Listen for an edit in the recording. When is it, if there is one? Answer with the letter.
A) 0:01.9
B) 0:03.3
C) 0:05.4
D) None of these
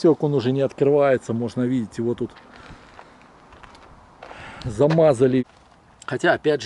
C